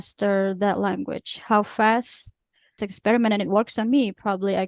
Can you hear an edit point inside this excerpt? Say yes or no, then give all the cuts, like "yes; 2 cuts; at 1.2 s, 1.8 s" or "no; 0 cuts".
yes; 1 cut; at 2.8 s